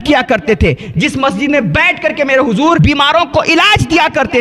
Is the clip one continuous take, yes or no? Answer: no